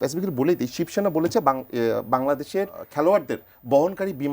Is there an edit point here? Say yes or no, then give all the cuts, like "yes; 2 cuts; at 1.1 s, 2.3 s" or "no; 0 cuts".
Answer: yes; 1 cut; at 2.8 s